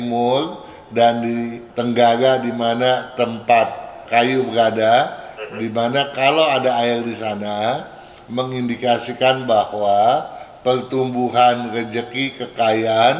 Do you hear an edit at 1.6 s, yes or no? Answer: yes